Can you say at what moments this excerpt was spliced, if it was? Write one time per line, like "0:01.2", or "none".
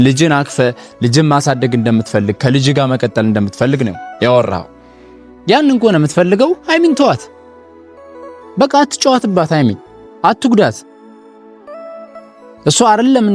none